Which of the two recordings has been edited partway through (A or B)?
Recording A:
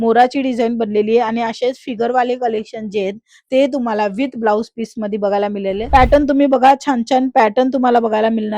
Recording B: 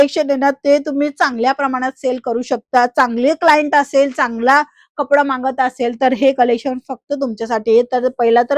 A